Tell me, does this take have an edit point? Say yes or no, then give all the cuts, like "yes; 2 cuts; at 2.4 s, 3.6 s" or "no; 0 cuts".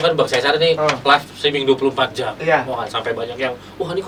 no; 0 cuts